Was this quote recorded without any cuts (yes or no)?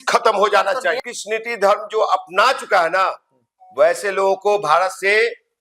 no